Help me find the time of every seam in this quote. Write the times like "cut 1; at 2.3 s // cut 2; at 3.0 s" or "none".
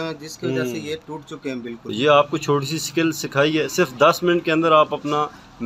cut 1; at 1.9 s